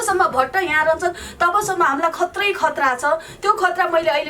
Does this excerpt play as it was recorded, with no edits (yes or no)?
yes